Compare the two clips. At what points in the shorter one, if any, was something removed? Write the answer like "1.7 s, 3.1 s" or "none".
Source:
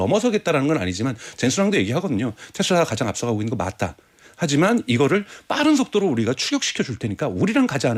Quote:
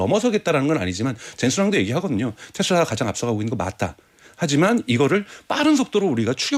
none